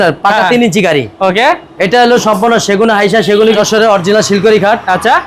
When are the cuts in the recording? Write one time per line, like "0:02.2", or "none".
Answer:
0:03.6